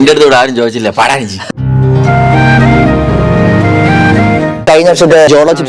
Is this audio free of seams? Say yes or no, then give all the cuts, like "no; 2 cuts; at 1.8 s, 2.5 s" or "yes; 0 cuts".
no; 1 cut; at 4.6 s